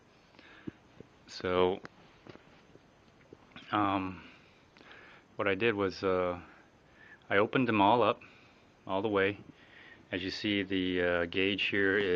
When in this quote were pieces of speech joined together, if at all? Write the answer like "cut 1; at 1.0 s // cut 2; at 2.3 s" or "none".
none